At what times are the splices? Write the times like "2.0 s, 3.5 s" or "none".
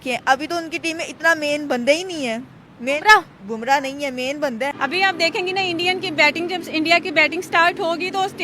4.7 s

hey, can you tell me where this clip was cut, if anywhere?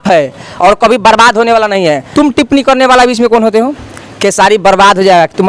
2.1 s

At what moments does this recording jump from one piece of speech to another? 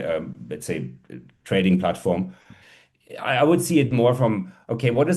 2.6 s

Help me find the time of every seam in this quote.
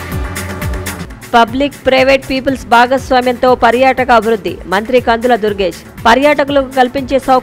1.0 s

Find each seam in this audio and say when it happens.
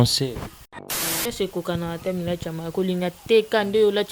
1.0 s

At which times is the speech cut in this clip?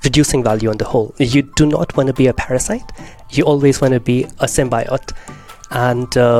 none

